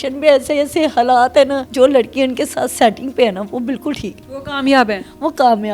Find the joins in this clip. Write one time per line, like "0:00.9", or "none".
0:01.6

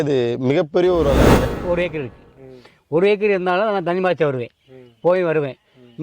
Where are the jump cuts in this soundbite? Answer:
0:01.3

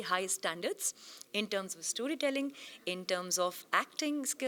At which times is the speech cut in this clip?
none

